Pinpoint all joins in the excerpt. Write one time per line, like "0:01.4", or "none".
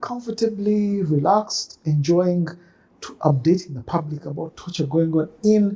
none